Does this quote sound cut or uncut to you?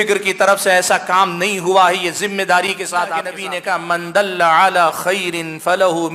cut